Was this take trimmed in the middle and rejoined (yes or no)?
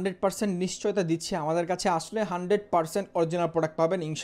no